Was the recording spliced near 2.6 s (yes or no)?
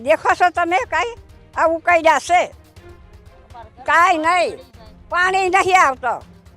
no